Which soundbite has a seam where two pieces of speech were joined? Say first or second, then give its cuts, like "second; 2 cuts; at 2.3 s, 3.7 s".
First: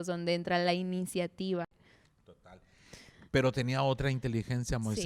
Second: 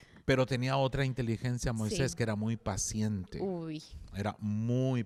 first; 1 cut; at 1.8 s